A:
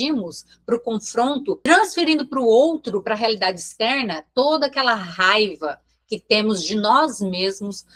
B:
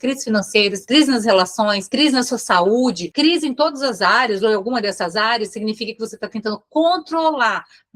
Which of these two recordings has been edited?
B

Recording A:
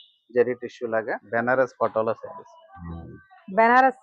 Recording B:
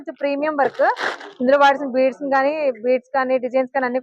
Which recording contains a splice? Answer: A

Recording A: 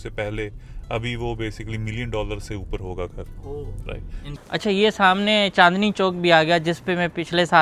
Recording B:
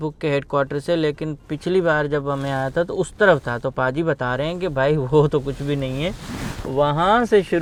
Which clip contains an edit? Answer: A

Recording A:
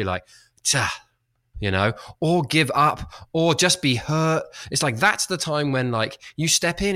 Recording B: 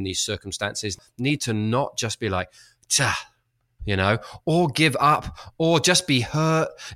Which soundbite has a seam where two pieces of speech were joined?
B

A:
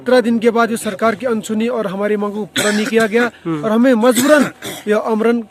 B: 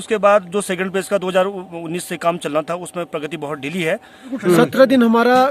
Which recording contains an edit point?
B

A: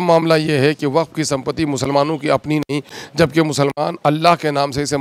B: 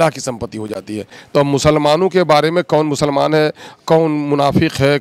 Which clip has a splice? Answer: B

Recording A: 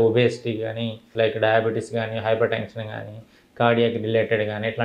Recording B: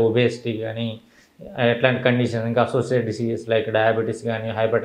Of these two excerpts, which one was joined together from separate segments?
A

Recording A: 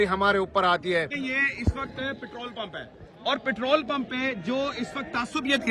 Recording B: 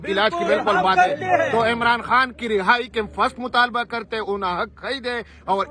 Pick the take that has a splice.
A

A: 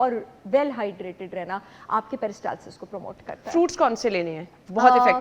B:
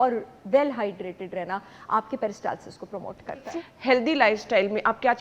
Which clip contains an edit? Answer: B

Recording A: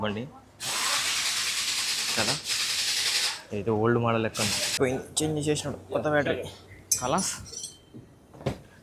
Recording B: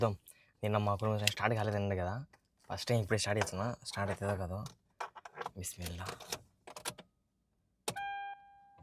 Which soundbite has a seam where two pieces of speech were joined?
A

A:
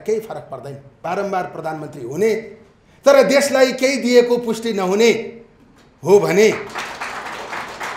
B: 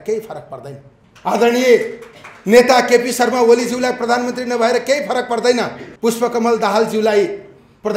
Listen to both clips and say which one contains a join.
A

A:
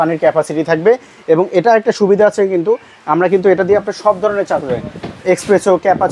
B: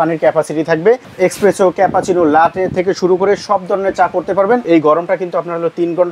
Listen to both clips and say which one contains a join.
B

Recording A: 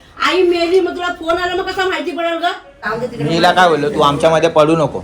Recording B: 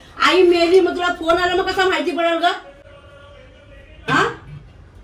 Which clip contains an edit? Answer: A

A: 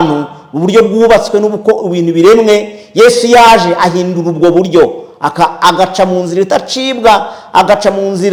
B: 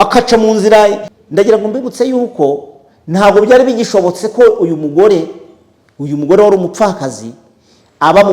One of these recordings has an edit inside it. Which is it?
B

